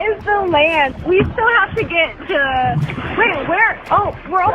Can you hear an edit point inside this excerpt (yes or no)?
yes